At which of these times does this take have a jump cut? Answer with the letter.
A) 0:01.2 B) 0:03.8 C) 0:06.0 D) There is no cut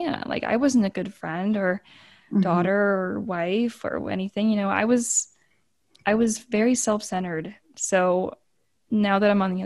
D